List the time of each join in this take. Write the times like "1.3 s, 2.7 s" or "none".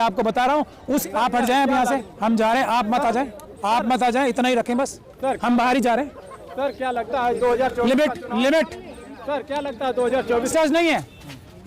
1.0 s, 10.5 s